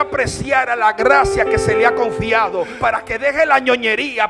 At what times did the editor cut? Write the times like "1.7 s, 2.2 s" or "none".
2.7 s